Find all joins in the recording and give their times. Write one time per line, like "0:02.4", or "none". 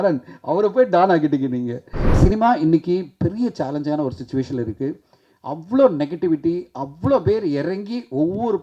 0:02.0